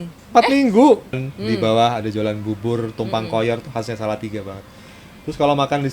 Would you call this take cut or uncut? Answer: cut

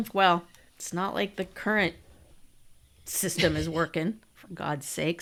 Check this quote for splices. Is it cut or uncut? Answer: uncut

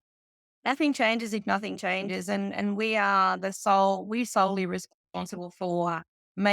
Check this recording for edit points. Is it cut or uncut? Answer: uncut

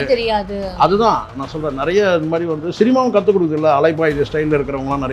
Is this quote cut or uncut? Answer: uncut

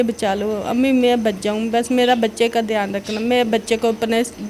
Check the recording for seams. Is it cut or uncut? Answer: uncut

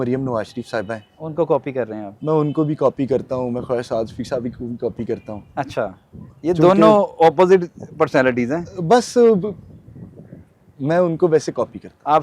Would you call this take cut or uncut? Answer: uncut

